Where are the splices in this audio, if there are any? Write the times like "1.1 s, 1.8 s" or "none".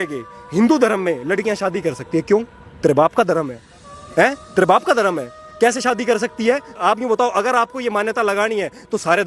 none